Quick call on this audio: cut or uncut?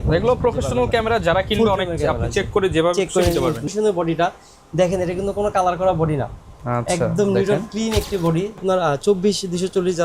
cut